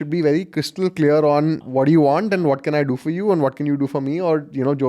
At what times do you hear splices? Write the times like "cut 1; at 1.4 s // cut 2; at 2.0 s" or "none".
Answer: cut 1; at 1.6 s